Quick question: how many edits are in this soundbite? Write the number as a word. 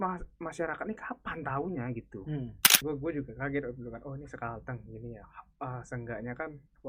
one